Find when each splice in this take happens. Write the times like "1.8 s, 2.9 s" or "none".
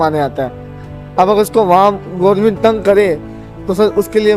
none